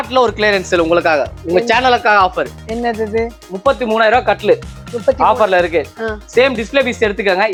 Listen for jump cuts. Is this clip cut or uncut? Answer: uncut